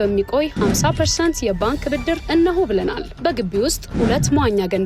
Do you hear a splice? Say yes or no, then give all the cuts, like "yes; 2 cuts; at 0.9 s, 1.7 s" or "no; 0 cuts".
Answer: no; 0 cuts